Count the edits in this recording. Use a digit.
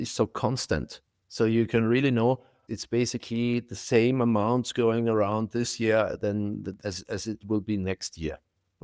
2